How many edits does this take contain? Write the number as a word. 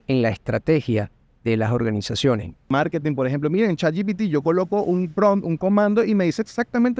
one